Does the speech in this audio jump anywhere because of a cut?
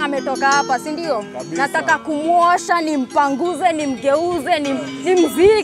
no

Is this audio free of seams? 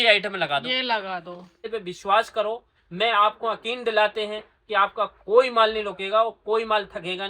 no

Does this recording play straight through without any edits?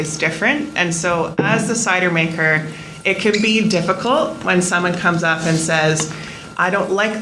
yes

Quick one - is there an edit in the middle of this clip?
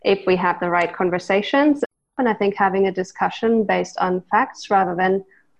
yes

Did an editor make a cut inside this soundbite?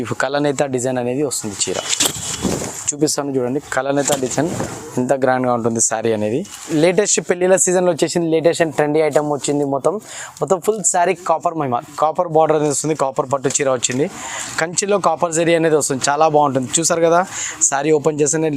yes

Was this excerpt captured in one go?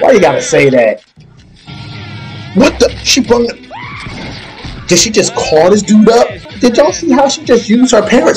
no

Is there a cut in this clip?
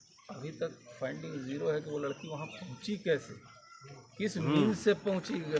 no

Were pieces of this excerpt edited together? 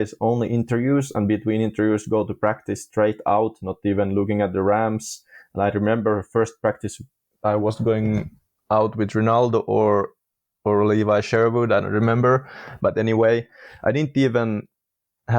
no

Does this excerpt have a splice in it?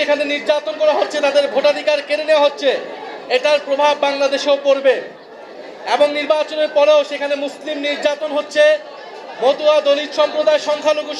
no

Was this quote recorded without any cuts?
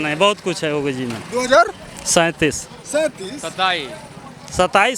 yes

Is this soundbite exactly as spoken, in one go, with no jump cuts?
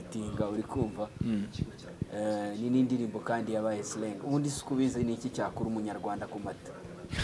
yes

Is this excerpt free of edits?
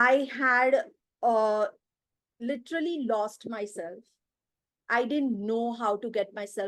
yes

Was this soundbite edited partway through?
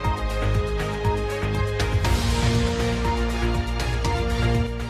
yes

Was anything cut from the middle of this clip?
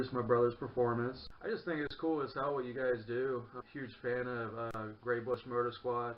no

